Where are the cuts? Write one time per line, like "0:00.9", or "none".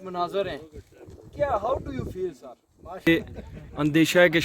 0:03.1